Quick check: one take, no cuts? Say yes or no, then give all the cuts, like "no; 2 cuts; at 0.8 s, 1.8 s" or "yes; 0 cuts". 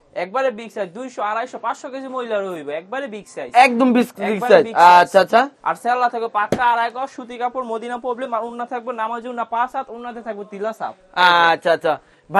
yes; 0 cuts